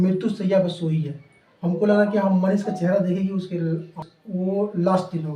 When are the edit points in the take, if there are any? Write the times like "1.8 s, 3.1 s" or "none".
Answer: 4.1 s